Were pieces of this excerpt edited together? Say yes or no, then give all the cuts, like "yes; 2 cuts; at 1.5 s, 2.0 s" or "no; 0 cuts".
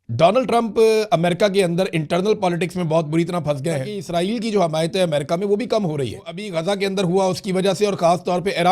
yes; 2 cuts; at 3.9 s, 6.4 s